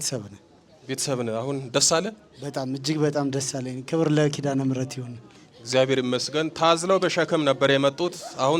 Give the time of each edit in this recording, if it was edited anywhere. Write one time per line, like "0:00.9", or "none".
none